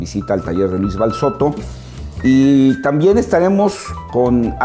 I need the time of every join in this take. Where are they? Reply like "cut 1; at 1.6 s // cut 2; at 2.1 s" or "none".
none